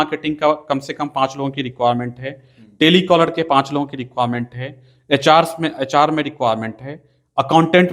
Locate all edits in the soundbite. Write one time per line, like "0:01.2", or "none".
none